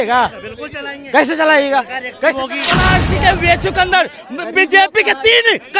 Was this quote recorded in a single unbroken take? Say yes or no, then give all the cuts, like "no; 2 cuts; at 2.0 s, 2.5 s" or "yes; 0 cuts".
no; 1 cut; at 2.8 s